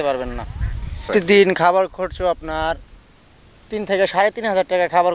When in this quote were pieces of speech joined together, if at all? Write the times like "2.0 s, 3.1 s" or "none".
1.0 s

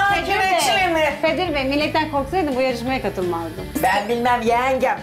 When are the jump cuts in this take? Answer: 1.2 s, 3.7 s

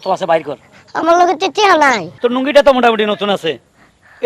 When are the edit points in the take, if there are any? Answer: 2.1 s

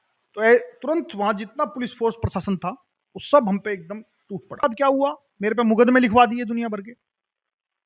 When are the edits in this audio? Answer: 4.6 s

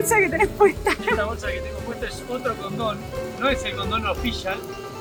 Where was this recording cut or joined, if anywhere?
none

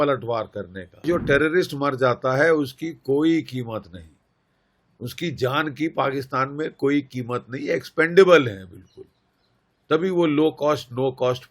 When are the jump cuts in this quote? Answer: 1.1 s

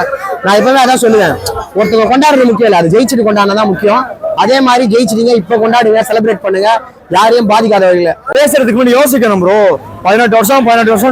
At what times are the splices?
8.2 s

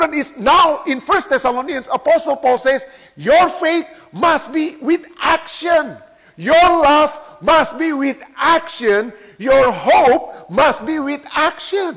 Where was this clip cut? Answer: none

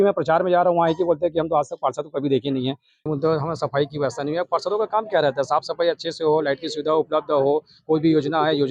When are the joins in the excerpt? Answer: 3.0 s

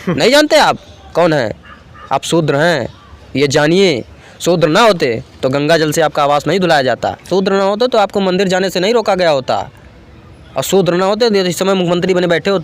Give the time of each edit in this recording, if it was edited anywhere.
7.3 s

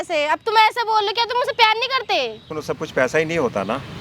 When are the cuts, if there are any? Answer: 2.5 s

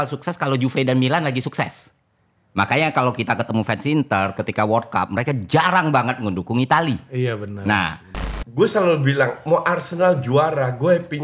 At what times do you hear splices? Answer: 8.3 s

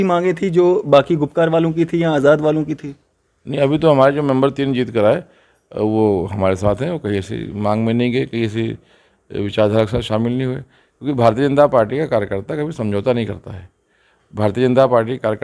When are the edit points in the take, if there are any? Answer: none

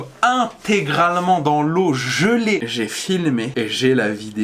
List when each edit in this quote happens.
2.6 s

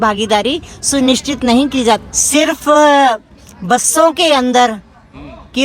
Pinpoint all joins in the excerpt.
2.0 s

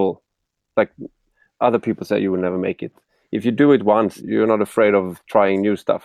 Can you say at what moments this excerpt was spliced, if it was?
4.2 s

